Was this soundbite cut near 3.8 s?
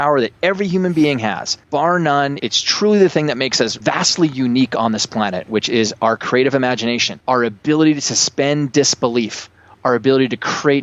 yes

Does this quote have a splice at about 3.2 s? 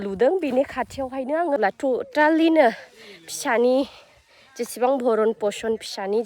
no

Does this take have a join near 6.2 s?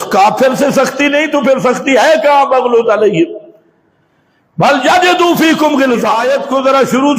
yes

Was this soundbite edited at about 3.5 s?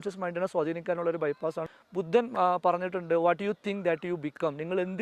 no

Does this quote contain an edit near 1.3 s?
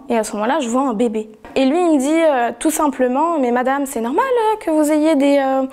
yes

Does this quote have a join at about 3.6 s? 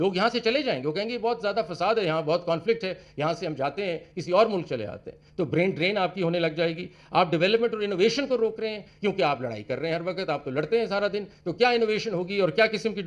no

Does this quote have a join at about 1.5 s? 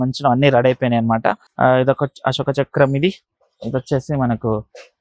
yes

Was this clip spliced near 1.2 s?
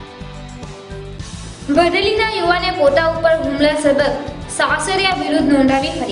no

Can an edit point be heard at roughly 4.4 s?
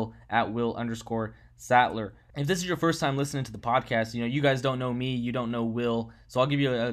no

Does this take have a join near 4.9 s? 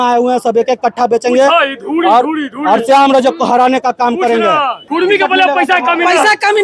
yes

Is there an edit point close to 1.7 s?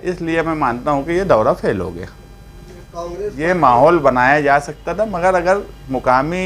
no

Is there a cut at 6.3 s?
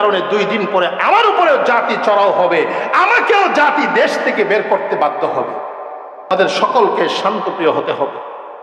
yes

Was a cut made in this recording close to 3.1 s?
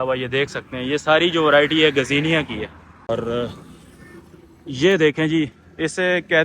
yes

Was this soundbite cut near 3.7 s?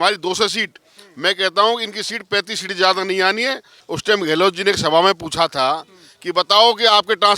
yes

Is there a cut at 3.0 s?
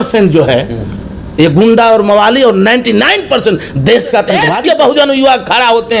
no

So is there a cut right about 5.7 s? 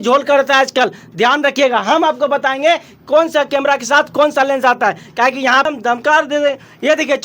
yes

